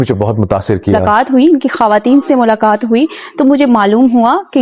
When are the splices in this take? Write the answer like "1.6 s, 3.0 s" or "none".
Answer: 1.0 s